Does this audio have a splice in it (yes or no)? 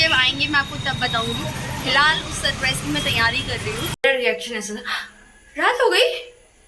yes